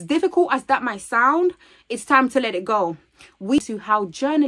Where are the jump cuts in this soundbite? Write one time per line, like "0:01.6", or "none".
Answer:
0:03.6